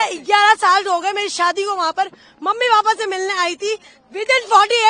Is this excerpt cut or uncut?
uncut